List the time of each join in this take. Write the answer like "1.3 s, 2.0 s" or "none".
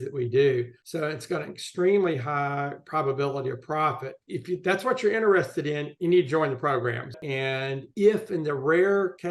7.1 s